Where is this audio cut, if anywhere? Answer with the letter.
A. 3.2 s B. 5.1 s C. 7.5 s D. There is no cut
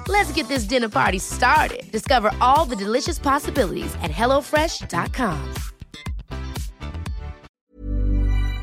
C